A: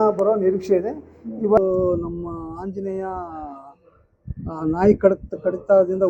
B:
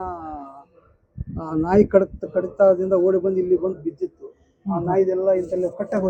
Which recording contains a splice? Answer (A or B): A